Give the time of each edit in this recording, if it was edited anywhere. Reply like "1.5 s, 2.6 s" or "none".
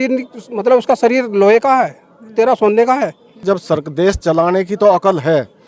3.4 s